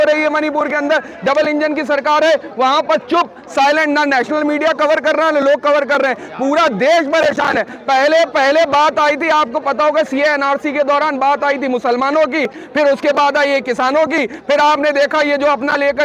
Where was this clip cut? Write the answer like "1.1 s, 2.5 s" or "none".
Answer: none